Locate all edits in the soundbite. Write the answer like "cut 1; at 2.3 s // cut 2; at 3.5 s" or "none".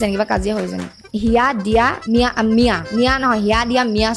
cut 1; at 1.0 s // cut 2; at 2.0 s // cut 3; at 2.8 s